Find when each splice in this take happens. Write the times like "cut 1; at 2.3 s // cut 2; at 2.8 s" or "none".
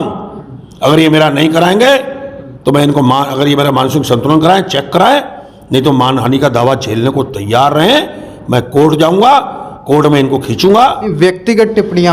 cut 1; at 11.0 s